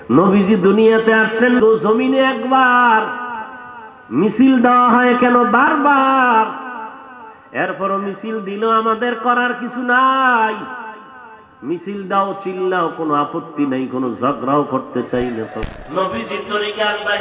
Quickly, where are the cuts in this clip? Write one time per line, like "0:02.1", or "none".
0:01.6
0:15.4